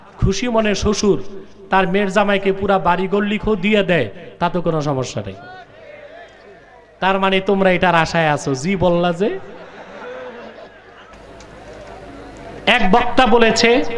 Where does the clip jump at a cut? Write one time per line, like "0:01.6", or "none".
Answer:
0:11.1